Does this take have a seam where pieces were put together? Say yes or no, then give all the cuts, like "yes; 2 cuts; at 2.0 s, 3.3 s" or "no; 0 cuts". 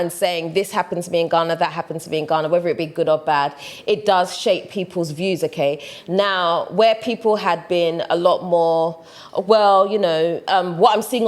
no; 0 cuts